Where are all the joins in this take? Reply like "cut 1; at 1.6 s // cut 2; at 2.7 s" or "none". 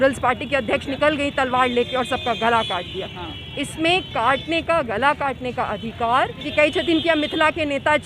cut 1; at 6.1 s